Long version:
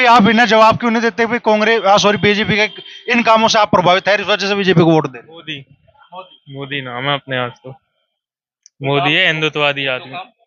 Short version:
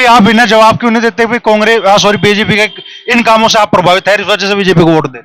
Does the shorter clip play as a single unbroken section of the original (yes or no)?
yes